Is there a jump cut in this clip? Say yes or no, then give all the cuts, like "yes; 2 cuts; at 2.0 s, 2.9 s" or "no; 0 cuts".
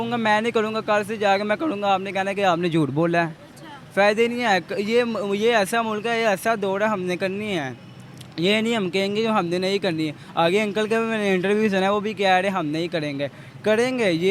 no; 0 cuts